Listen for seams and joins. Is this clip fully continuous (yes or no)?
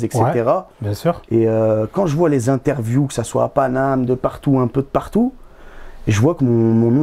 yes